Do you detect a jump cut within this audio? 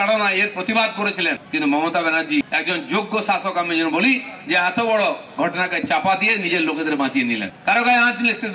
yes; 3 cuts; at 1.4 s, 2.5 s, 7.5 s

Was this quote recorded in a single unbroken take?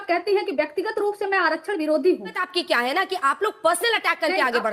no; 1 cut; at 2.4 s

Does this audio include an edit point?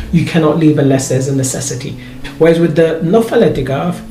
yes; 1 cut; at 2.1 s

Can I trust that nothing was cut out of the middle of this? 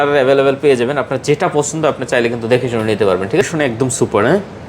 no; 1 cut; at 3.4 s

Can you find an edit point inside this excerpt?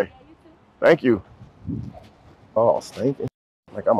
yes; 1 cut; at 2.6 s

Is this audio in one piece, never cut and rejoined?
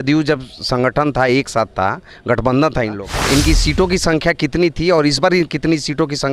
no; 1 cut; at 3.0 s

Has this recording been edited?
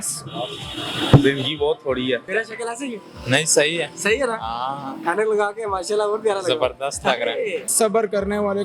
yes; 2 cuts; at 2.3 s, 7.7 s

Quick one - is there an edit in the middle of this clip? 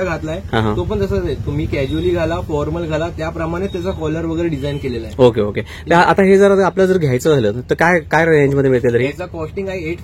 no; 0 cuts

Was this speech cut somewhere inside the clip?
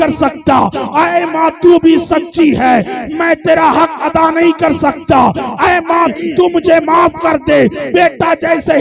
yes; 1 cut; at 6.1 s

